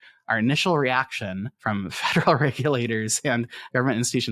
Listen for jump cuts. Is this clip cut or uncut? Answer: cut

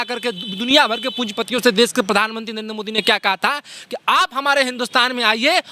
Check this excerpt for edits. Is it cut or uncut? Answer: uncut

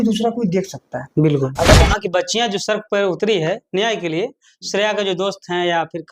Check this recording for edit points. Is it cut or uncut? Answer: cut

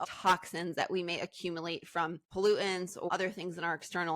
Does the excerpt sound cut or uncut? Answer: cut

